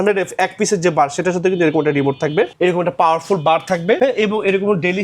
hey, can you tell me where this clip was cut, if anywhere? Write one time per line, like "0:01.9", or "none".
0:02.5
0:04.0